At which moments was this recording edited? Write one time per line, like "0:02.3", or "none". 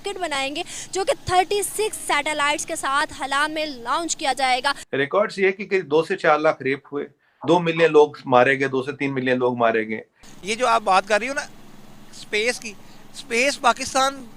0:04.8
0:10.3